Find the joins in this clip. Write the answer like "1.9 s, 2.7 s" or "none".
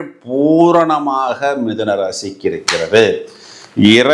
none